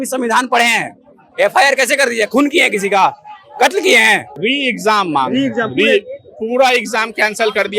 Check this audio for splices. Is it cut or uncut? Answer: cut